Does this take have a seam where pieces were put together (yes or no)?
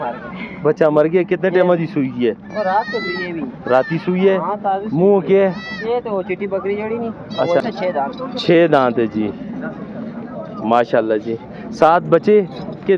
yes